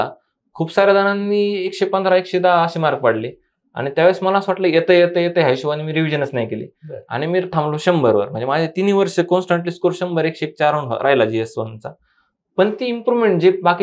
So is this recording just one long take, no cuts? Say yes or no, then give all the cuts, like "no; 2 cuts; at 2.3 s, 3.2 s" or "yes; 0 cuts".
yes; 0 cuts